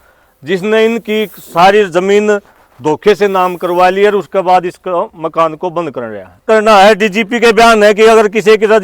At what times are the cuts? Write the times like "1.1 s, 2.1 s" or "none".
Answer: 6.4 s

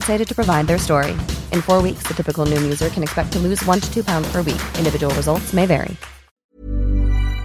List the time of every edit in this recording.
6.5 s

